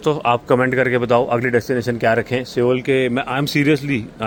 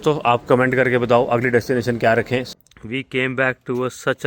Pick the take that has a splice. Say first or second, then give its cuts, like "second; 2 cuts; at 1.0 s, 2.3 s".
second; 1 cut; at 2.5 s